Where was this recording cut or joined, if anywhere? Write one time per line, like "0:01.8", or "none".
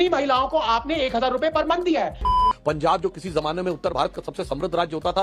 0:02.4